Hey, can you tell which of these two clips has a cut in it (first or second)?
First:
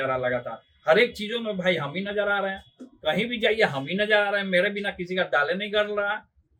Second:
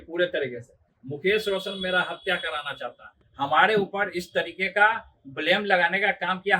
second